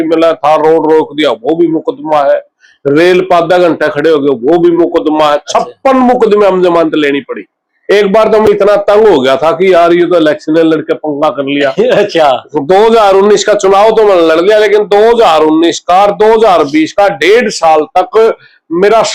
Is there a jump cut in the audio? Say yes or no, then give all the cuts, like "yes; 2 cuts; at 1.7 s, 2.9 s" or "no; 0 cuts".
no; 0 cuts